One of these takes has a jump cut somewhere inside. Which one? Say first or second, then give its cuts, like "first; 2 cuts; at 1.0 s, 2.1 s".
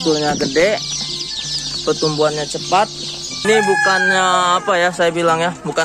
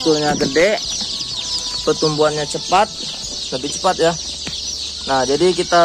first; 1 cut; at 3.4 s